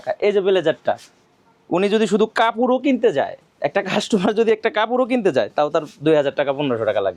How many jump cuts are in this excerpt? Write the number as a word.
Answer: zero